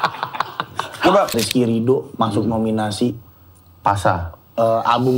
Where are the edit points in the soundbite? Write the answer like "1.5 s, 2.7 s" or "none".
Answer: 1.3 s

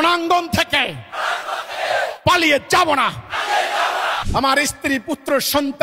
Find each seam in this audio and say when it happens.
4.2 s

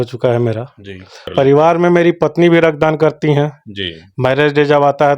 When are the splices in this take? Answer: 1.2 s

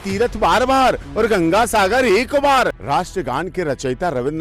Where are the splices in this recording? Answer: 2.8 s

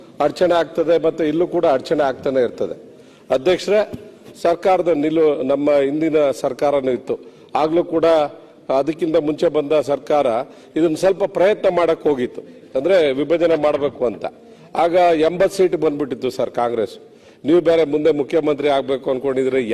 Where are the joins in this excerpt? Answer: 4.2 s

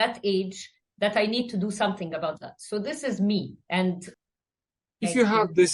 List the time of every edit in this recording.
4.1 s

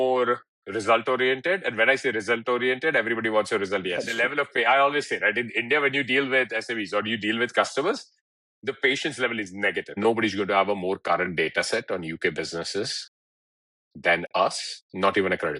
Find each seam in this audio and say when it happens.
4.1 s, 10.0 s

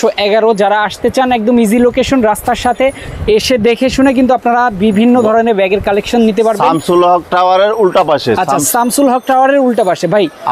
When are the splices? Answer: none

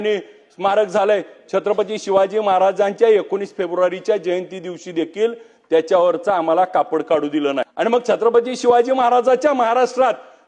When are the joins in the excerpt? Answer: 7.7 s

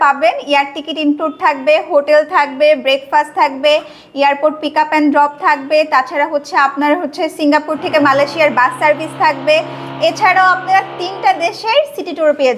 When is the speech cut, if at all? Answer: none

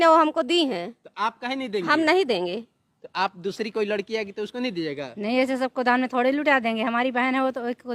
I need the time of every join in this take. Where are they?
none

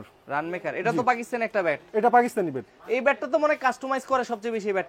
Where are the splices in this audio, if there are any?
none

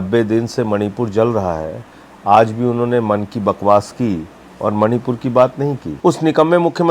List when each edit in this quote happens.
5.9 s

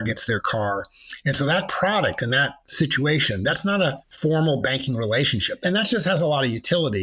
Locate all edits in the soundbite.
4.1 s, 5.6 s

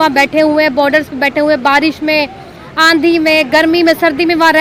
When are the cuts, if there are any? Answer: none

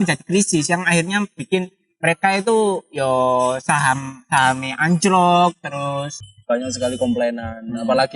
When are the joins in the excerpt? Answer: 6.1 s

